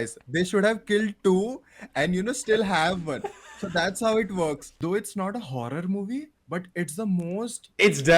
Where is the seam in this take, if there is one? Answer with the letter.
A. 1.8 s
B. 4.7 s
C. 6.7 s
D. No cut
B